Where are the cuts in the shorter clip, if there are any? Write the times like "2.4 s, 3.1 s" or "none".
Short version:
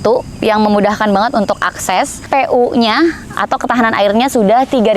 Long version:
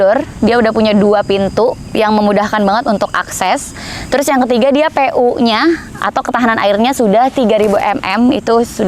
2.3 s